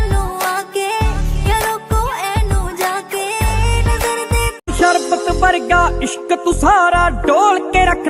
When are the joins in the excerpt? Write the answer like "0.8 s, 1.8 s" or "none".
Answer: 4.6 s